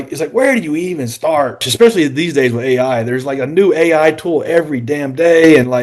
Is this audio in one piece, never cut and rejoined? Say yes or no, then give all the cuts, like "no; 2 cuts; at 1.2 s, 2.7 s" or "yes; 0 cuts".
no; 1 cut; at 1.6 s